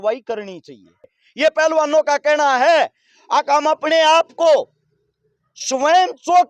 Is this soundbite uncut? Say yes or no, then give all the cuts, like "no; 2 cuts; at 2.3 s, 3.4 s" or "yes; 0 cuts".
no; 1 cut; at 1.2 s